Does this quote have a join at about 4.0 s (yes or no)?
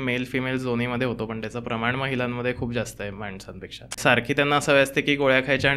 yes